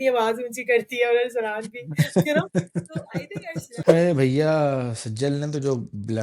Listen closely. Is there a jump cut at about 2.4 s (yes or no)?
no